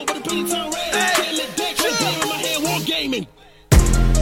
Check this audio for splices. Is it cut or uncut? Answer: cut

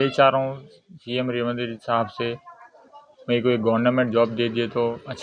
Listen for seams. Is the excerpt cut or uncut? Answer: uncut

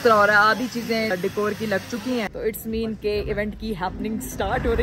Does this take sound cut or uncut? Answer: cut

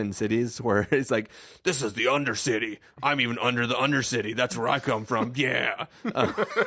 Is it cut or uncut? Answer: uncut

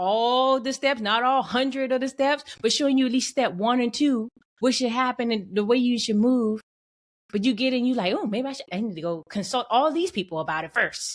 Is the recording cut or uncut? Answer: cut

